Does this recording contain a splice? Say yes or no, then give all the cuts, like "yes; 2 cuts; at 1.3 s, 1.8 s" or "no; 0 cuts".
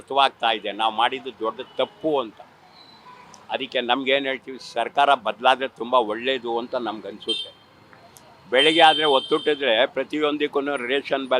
no; 0 cuts